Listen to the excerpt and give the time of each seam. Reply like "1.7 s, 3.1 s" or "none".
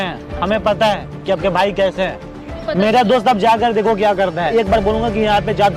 2.6 s, 4.5 s